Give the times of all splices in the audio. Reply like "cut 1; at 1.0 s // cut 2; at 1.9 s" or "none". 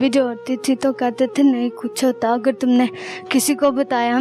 none